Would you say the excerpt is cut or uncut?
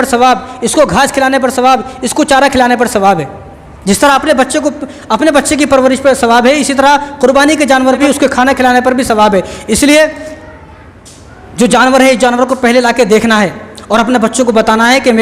uncut